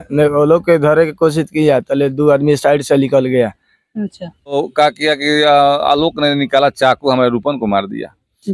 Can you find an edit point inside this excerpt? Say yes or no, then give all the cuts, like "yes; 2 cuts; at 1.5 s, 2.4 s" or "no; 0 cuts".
yes; 1 cut; at 4.5 s